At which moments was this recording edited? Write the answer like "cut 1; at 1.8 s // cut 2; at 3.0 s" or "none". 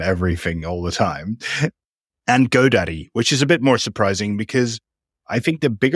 cut 1; at 1.8 s